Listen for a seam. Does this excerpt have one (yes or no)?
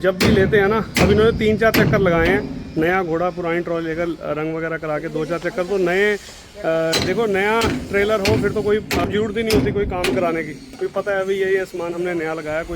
yes